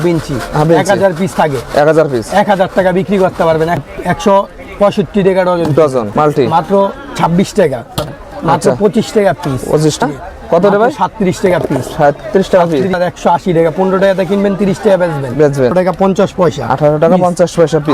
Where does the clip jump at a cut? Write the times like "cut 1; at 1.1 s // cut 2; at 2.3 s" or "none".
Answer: cut 1; at 3.8 s // cut 2; at 6.1 s // cut 3; at 8.2 s // cut 4; at 10.0 s // cut 5; at 13.0 s // cut 6; at 15.7 s